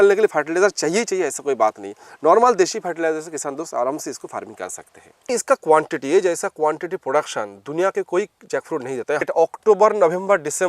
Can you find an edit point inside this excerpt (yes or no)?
yes